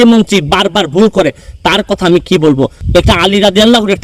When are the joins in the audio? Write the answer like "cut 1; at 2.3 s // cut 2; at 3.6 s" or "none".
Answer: cut 1; at 2.8 s